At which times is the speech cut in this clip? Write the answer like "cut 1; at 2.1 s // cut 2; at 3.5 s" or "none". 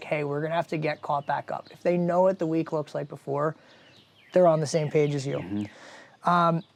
none